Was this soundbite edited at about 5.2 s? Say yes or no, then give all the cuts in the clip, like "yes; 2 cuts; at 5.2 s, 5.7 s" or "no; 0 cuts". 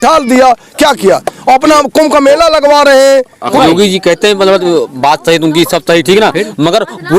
no; 1 cut; at 3.5 s